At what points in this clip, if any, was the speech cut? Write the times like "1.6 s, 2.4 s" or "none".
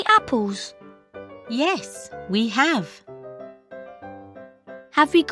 3.1 s, 4.5 s